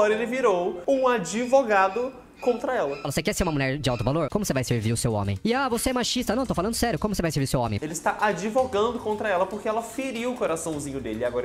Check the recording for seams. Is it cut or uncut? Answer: uncut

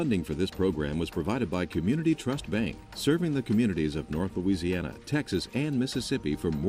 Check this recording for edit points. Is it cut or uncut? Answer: uncut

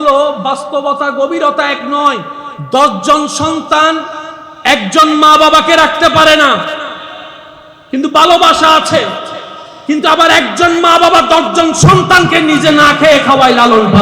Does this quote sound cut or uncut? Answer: cut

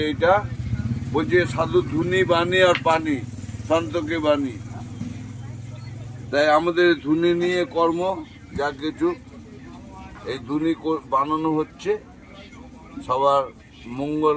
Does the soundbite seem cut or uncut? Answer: uncut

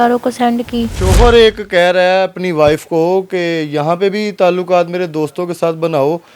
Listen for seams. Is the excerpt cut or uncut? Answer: cut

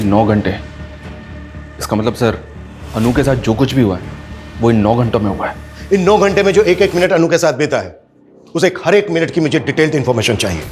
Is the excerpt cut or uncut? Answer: uncut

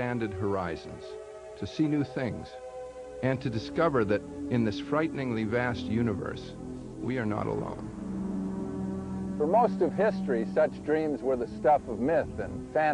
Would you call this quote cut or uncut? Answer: cut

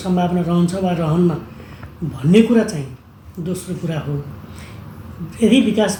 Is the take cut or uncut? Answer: uncut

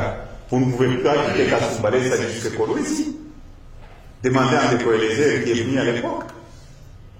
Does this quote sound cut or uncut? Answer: uncut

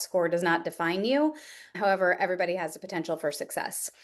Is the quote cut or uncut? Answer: cut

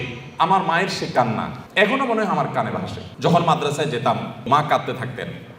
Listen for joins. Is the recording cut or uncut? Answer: cut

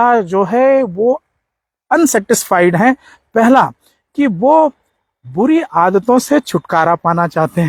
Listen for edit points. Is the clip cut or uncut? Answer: uncut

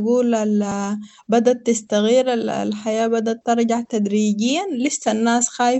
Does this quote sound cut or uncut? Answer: uncut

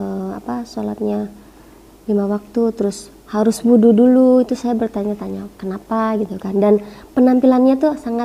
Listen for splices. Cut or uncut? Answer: uncut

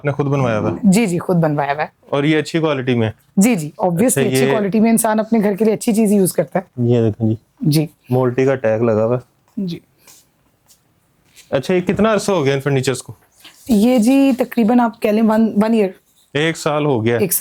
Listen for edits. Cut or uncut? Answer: uncut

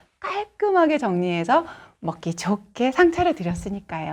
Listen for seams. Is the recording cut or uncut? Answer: uncut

